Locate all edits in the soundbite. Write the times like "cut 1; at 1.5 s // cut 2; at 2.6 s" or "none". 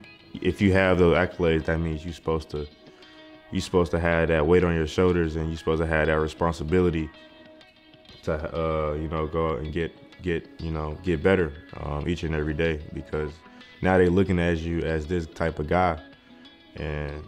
none